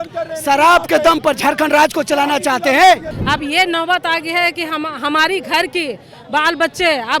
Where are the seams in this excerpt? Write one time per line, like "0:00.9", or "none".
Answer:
0:03.2